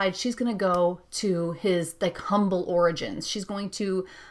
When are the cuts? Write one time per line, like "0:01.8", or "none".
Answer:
none